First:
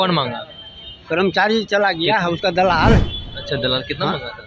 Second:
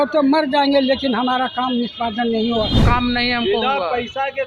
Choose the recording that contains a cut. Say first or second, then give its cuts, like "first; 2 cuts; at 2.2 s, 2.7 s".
second; 1 cut; at 2.8 s